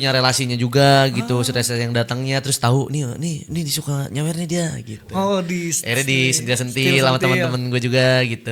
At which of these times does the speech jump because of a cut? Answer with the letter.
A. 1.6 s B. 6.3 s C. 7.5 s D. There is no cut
D